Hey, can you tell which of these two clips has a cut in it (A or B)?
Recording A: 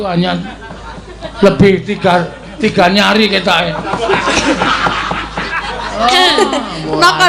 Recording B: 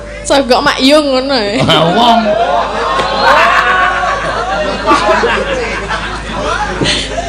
A